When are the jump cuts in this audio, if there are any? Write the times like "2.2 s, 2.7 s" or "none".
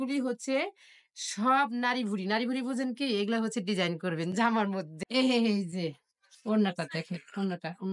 5.0 s